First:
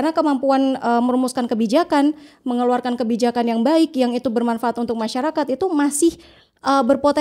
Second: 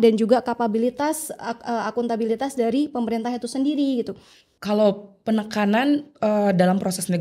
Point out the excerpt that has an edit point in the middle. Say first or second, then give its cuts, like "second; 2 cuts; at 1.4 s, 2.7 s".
second; 1 cut; at 4.5 s